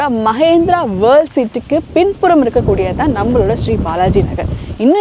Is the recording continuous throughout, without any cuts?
yes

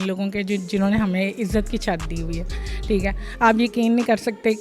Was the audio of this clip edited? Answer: no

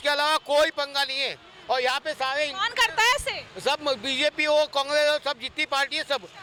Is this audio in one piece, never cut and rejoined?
yes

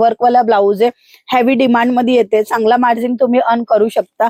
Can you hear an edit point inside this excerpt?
no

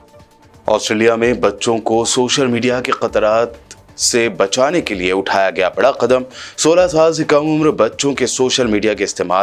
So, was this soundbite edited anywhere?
no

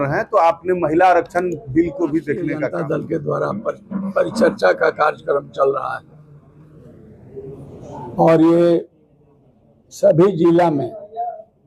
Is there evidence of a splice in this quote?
yes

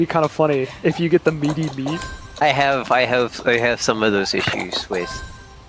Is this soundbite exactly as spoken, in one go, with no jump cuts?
no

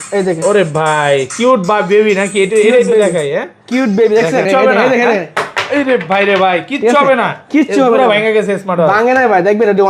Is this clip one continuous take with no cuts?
no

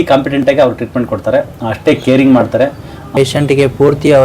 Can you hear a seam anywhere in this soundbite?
yes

